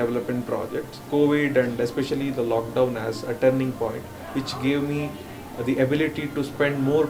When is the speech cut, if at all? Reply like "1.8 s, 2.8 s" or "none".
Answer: 1.0 s

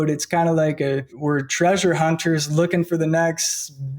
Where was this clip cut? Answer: 1.1 s

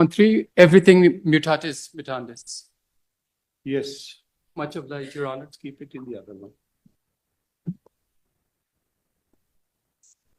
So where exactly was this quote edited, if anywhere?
none

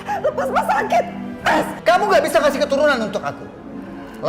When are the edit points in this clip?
1.7 s

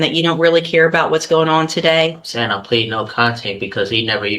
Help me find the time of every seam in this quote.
none

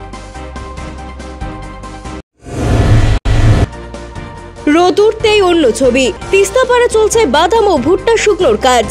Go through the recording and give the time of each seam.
none

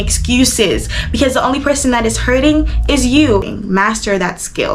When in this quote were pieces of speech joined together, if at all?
3.5 s

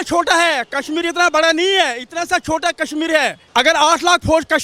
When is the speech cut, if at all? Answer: none

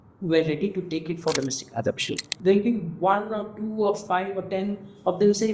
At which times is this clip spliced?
2.3 s

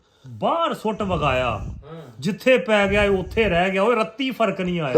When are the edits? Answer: none

